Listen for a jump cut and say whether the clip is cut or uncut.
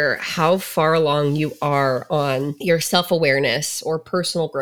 cut